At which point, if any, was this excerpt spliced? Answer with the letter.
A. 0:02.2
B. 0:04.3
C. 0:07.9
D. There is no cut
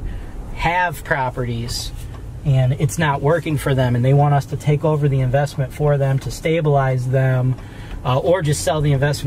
D